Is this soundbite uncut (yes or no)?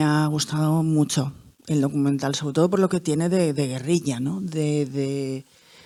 yes